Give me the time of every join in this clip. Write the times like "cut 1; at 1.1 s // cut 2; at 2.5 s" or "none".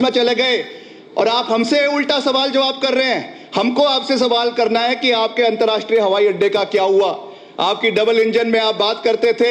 none